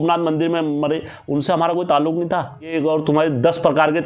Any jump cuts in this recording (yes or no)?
yes